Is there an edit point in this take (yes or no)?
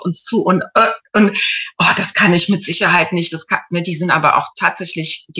no